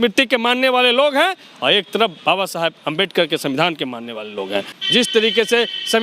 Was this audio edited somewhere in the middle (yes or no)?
yes